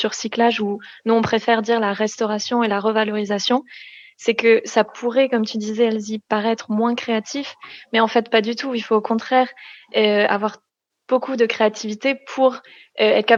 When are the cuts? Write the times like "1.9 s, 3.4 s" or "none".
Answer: none